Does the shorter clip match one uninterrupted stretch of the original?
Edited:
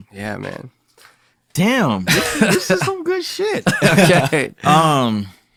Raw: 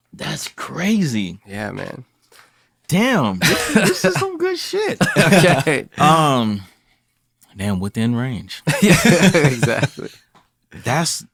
yes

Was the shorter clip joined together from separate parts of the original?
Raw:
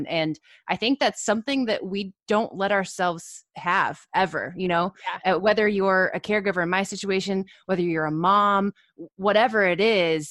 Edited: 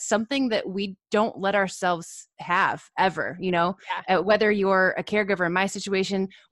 no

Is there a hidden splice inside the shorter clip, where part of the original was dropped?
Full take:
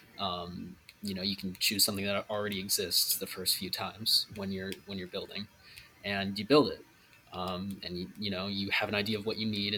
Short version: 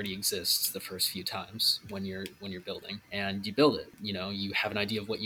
yes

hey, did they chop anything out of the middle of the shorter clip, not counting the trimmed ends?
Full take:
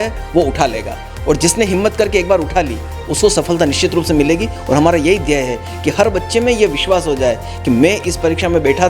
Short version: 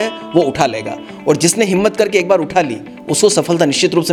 no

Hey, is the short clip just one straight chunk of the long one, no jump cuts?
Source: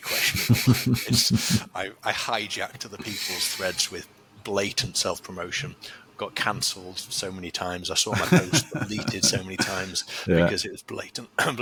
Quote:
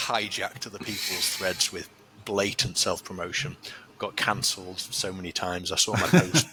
yes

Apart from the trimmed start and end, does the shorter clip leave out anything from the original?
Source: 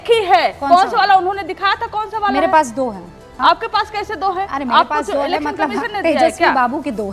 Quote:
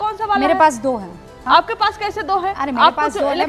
no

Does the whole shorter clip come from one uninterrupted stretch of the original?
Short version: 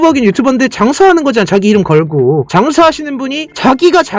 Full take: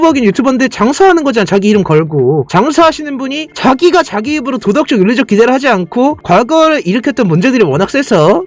yes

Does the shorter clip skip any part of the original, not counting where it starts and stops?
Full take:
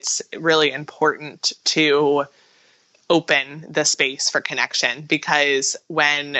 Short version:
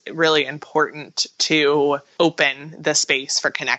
yes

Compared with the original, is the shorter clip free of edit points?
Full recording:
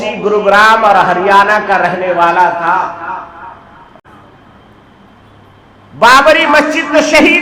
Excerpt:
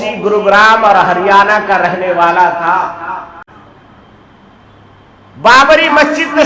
no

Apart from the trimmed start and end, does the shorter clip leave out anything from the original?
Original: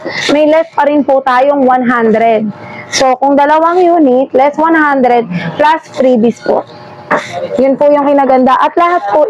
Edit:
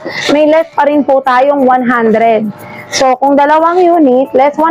no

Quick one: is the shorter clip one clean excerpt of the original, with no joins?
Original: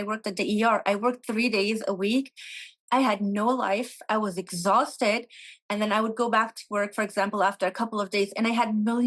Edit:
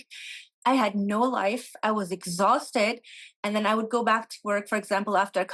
yes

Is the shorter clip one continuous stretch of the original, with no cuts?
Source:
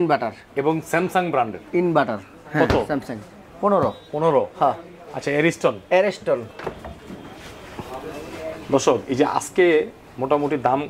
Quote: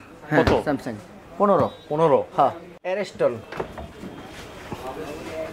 no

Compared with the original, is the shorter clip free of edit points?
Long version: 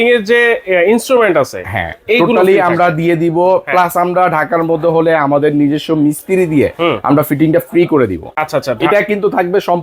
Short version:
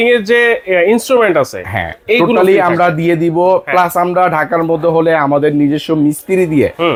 yes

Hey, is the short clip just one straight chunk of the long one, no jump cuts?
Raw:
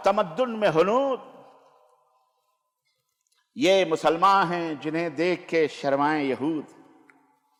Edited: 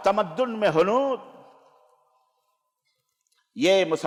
yes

